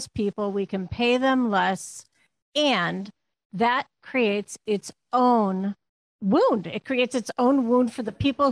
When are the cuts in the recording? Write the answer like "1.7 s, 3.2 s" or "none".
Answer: none